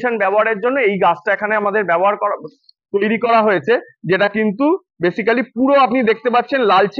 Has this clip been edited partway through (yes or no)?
no